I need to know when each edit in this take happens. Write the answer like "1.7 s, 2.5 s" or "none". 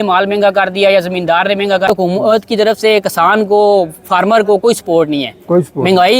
1.9 s